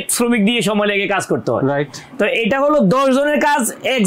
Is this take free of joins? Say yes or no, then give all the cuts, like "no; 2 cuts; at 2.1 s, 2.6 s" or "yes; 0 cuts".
yes; 0 cuts